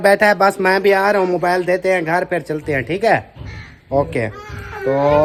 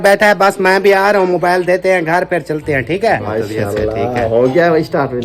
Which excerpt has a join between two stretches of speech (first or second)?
second